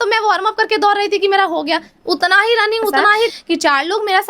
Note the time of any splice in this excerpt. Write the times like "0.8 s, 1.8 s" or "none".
3.3 s